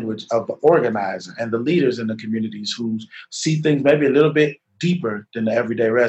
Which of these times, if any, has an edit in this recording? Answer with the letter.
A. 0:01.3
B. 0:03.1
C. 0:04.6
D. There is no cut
D